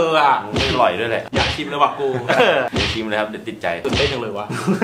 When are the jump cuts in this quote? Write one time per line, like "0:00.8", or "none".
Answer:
0:01.2
0:03.8